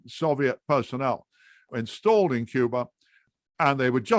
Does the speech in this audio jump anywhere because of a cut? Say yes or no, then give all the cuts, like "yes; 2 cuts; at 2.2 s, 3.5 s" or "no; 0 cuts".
yes; 2 cuts; at 1.7 s, 3.3 s